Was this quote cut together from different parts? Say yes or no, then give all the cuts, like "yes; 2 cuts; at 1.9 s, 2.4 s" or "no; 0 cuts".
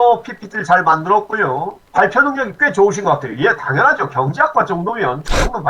no; 0 cuts